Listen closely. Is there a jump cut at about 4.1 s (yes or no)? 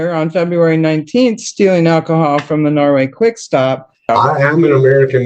yes